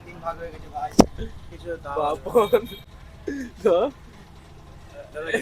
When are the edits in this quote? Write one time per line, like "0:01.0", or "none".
none